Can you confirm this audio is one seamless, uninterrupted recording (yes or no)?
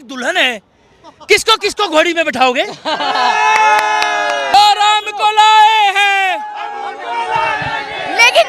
no